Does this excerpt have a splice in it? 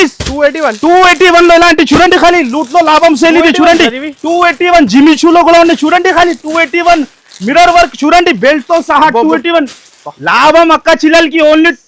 no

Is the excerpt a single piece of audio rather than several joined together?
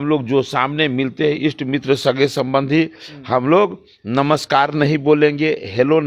yes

